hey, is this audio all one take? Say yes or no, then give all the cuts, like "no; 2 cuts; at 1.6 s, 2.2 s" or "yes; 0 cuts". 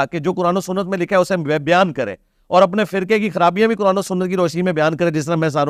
yes; 0 cuts